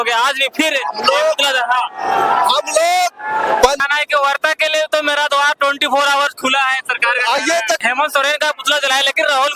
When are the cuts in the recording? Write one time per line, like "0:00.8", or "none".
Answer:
0:03.8
0:07.8